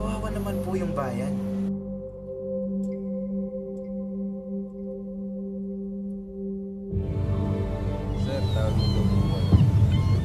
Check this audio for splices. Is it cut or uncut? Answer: uncut